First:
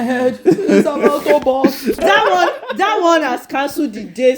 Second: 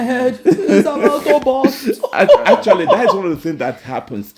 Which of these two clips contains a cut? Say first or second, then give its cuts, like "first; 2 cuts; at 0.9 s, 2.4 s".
first; 1 cut; at 2.0 s